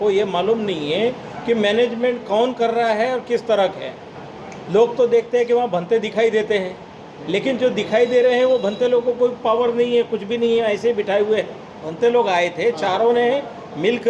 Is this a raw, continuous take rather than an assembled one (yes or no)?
no